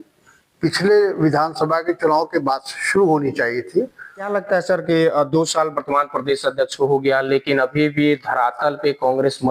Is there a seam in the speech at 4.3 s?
yes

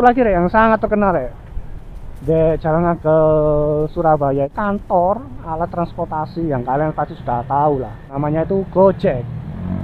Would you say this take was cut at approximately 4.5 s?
yes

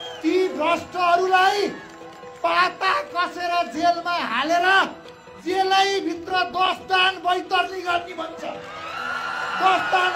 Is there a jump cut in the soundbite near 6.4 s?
no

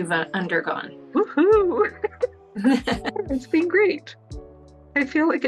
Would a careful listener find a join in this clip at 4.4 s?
no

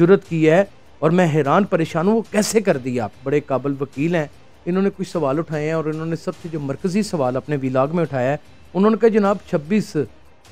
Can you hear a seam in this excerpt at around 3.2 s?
yes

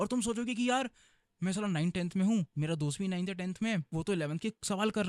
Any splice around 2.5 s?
yes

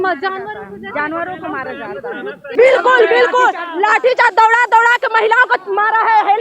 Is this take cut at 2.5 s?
yes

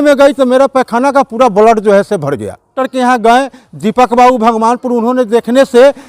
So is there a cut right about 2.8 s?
yes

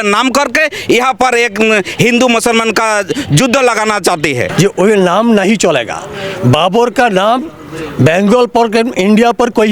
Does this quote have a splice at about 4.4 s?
yes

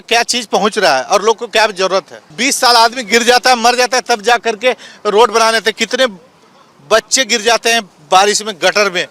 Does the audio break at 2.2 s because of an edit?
yes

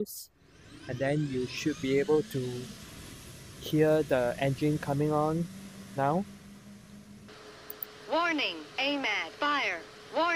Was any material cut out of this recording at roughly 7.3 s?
yes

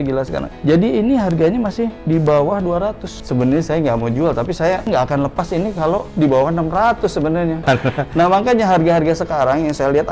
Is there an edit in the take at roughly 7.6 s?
yes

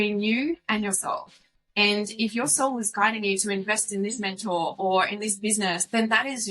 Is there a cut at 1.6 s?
no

